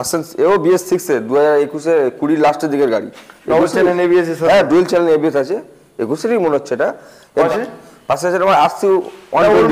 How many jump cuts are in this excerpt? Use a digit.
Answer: 1